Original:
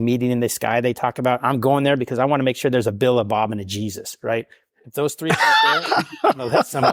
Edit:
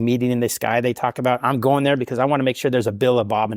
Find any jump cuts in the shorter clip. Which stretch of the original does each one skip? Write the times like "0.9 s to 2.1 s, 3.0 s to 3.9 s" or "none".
none